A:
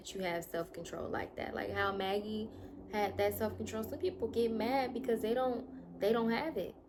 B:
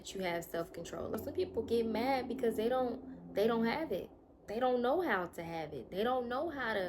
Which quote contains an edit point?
B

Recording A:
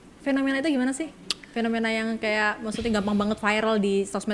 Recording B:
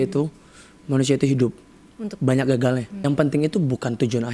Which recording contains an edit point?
B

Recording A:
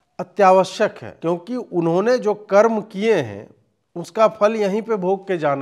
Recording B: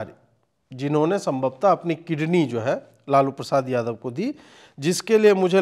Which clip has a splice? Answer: A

